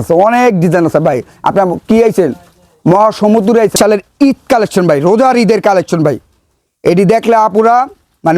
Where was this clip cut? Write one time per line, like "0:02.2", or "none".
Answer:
0:03.7